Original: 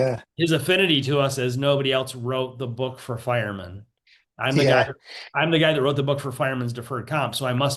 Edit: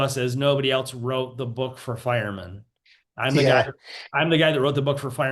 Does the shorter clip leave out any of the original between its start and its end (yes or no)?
no